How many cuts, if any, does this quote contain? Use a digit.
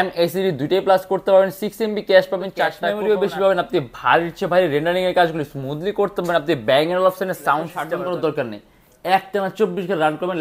2